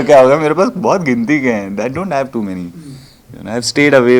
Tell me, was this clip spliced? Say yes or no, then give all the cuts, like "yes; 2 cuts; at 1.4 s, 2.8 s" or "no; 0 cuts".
no; 0 cuts